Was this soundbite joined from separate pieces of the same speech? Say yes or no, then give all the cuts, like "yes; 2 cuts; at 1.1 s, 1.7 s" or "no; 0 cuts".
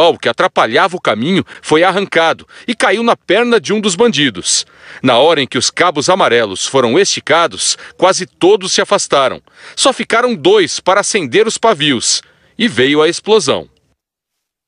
no; 0 cuts